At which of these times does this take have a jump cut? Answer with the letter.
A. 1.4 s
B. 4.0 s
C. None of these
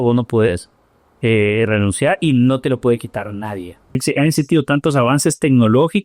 B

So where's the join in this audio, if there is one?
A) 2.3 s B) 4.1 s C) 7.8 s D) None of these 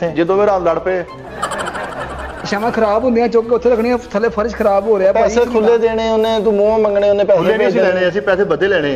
A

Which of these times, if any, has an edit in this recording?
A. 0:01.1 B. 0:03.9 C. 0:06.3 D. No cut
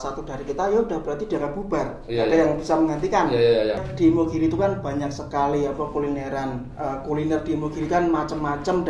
B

